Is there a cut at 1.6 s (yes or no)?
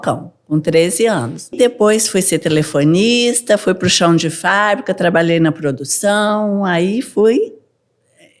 yes